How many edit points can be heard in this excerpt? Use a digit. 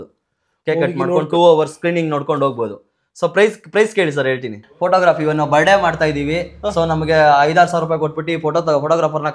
1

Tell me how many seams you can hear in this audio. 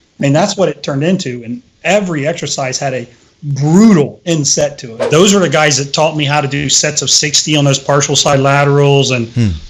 1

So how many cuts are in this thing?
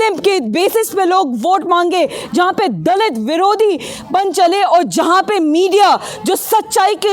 0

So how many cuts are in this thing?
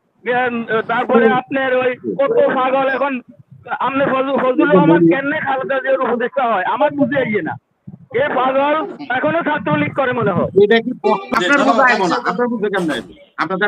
1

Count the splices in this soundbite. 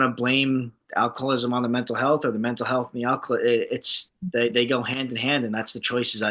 0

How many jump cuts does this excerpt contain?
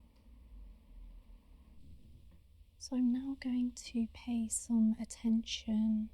1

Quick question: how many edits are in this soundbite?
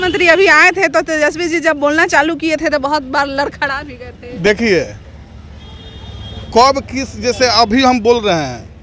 0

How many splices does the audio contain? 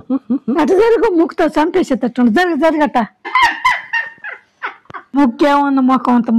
1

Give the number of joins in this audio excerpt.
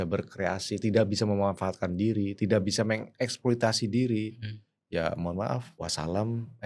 1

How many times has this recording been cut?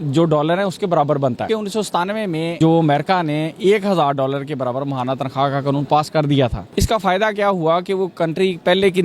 3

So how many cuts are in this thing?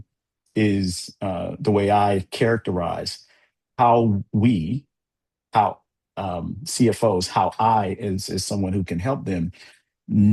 0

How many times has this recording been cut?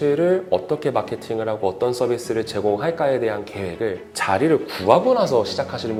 0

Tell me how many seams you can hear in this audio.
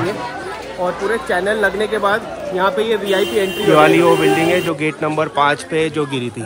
1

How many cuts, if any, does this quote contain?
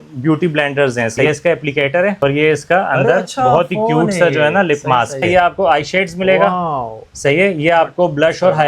3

